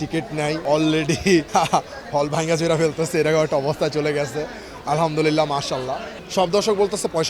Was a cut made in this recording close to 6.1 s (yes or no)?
yes